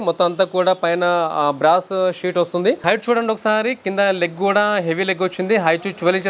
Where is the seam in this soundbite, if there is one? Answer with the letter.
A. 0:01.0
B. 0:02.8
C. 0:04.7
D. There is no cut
B